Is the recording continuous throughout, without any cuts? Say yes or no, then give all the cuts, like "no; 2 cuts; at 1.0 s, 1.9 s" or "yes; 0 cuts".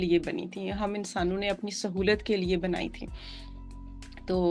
yes; 0 cuts